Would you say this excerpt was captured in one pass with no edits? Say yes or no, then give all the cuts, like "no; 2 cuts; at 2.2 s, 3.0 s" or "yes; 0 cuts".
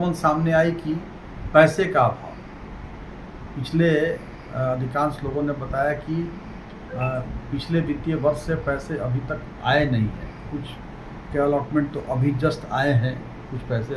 yes; 0 cuts